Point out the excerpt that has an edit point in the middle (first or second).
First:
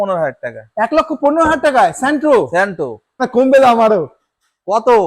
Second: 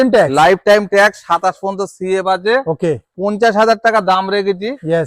first